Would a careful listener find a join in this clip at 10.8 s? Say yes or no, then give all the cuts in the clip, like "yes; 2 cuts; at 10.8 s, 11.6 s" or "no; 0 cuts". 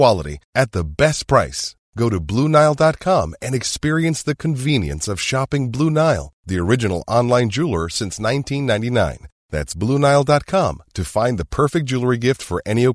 no; 0 cuts